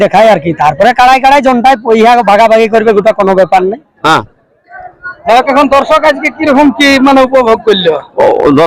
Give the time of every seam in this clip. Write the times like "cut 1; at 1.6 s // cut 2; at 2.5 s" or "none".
cut 1; at 4.0 s